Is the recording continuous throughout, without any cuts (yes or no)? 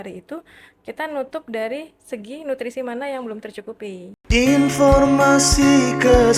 no